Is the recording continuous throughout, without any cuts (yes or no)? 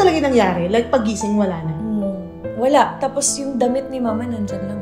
yes